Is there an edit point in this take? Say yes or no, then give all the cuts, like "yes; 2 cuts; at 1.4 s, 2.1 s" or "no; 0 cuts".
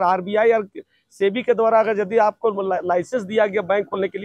no; 0 cuts